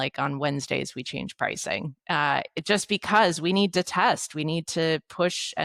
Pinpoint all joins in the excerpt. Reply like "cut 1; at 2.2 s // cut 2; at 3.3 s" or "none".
none